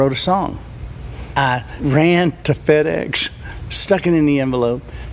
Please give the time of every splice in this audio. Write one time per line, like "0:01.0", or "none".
0:01.2
0:02.4